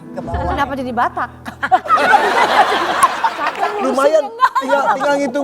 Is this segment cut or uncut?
cut